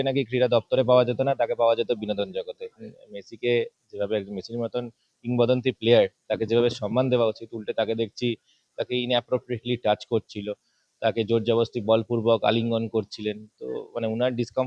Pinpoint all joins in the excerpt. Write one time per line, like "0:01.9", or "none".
0:02.9